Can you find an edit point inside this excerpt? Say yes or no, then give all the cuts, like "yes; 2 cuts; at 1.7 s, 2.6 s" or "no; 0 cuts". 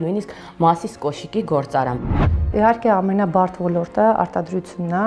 yes; 1 cut; at 2.0 s